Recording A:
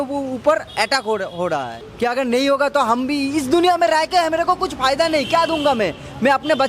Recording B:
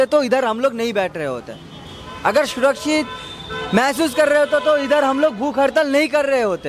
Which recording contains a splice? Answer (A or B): A